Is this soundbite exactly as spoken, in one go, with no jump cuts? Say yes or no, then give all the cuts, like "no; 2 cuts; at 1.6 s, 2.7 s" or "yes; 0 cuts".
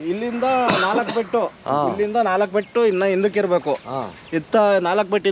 yes; 0 cuts